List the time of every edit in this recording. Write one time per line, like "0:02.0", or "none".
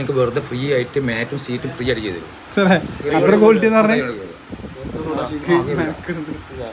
none